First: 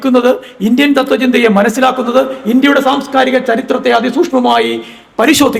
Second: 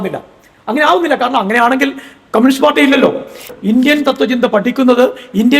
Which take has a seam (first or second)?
second